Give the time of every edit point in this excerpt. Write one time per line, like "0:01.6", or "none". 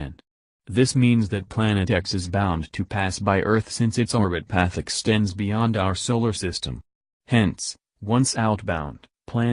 0:04.6